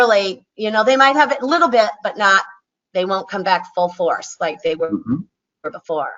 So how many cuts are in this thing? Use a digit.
0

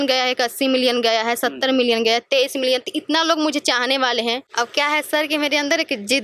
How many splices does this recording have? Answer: 1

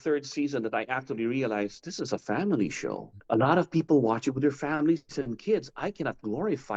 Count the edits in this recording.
1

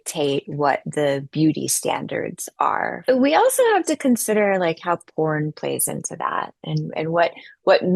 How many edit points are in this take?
1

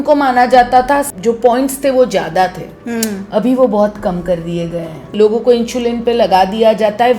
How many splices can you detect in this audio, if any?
2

